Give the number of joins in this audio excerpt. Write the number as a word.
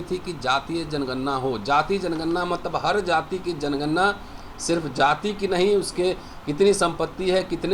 zero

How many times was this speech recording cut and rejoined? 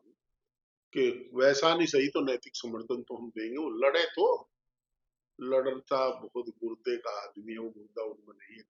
zero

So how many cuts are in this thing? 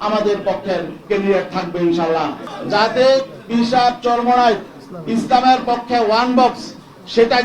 one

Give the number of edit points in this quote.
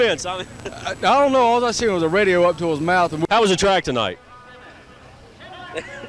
one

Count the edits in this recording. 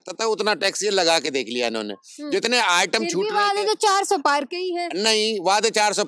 zero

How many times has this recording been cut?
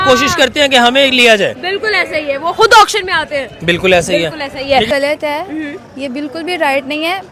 one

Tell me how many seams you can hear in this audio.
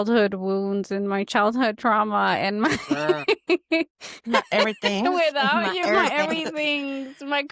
zero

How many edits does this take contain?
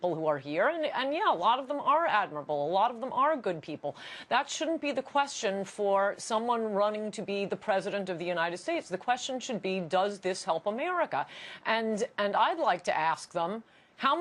one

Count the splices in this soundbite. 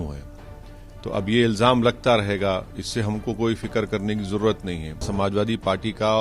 one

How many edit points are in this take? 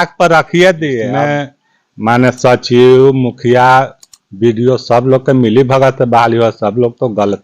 one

